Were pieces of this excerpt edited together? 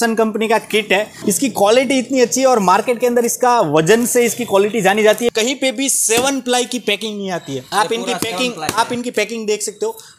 yes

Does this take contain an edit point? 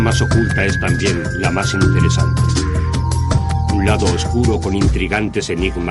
yes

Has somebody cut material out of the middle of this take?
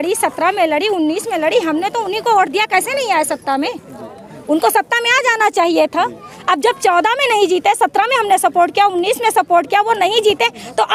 no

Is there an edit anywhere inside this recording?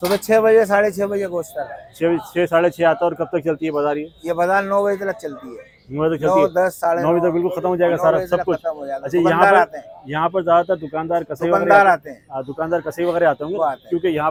no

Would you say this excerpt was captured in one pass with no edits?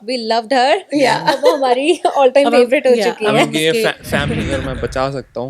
no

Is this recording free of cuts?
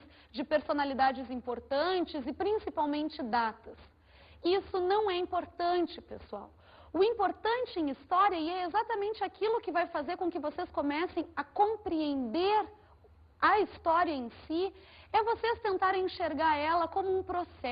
no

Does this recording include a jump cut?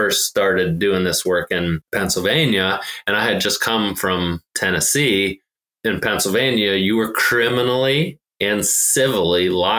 yes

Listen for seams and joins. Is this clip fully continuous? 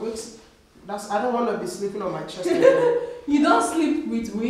yes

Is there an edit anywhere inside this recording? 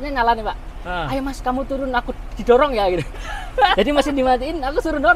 no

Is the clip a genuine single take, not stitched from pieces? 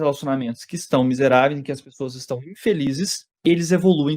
no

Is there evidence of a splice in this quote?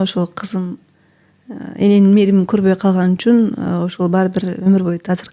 no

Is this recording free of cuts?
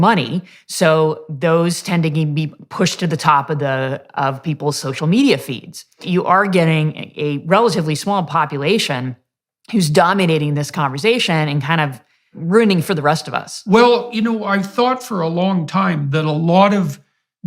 no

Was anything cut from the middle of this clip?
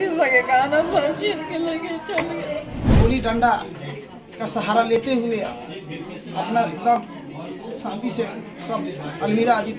yes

